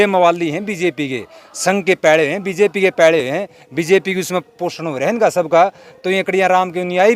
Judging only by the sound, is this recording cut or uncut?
uncut